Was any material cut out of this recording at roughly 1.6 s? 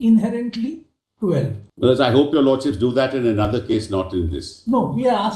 yes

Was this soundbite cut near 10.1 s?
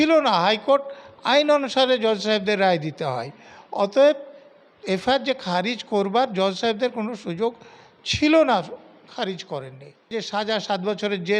yes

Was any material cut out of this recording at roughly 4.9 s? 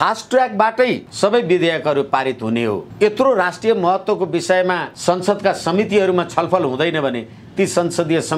yes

